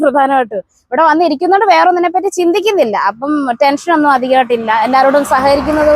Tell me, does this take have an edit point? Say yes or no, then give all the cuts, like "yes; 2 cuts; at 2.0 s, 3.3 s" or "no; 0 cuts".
no; 0 cuts